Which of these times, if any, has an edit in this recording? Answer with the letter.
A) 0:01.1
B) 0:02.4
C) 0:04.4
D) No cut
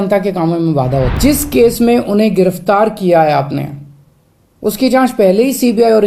A